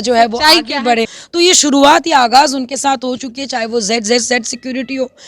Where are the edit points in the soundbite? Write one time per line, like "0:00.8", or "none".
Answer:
0:01.2